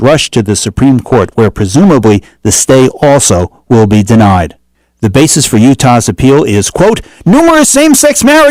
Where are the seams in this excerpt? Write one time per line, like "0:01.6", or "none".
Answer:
none